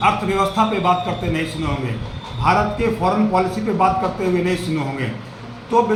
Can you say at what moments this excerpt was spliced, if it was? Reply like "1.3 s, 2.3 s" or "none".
none